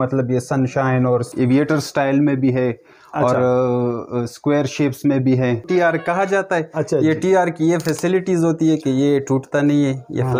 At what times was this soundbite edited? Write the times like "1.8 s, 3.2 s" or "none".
1.3 s, 5.7 s